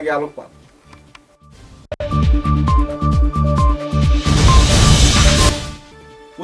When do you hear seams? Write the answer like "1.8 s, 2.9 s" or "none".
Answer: 1.9 s, 5.5 s